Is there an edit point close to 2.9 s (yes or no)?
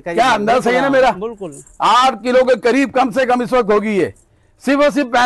no